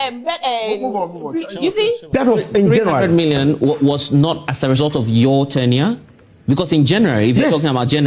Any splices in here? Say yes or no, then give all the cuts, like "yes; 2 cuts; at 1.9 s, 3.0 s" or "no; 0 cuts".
yes; 1 cut; at 2.0 s